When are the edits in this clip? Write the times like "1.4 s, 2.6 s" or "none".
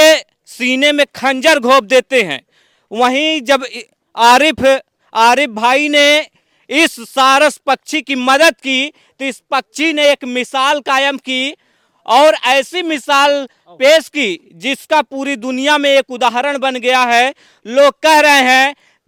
none